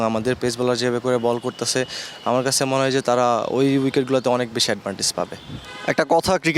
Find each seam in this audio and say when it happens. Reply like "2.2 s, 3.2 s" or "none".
none

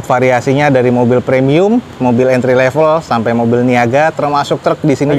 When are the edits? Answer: none

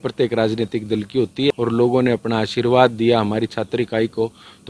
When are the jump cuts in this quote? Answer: 1.5 s

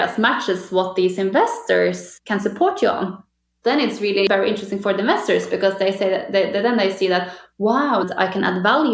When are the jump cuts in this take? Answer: 2.1 s, 4.3 s, 8.1 s

